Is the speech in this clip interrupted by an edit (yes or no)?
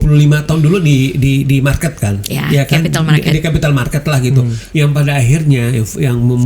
yes